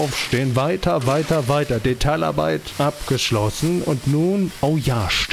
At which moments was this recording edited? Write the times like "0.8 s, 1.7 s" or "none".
2.7 s, 4.5 s